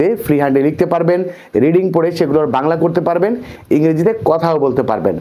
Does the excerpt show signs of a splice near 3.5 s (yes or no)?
no